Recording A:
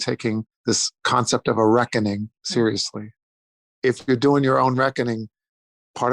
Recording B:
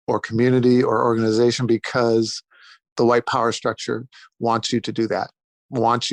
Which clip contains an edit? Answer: A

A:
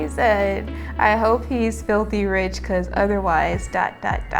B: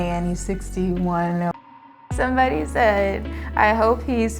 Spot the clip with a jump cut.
B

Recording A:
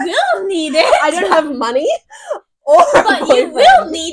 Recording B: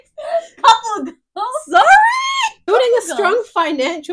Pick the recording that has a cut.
B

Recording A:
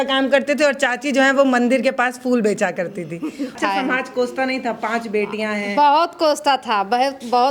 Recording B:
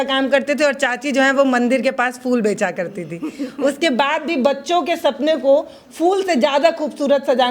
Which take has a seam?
A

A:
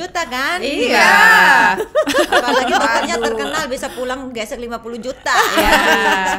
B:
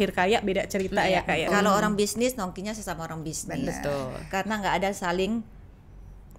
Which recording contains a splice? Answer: B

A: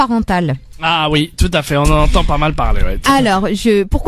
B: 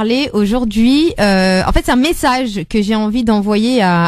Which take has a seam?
A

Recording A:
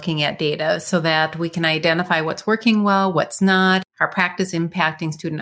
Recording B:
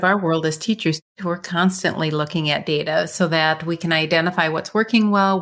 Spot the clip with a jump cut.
B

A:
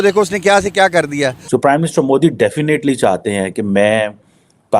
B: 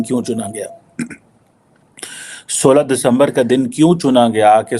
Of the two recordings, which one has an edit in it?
A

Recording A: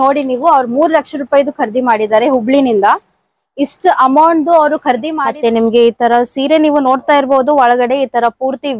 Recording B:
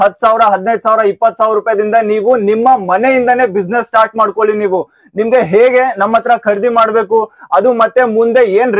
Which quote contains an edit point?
A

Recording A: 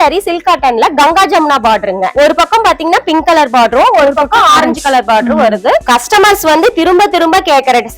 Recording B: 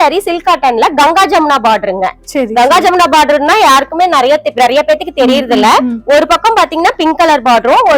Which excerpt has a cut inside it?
A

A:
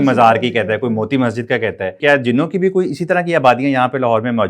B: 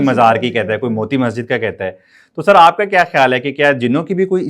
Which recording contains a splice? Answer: A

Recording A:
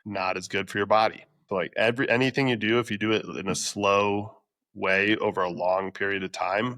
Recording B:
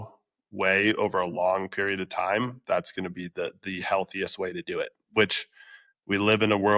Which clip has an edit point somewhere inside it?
A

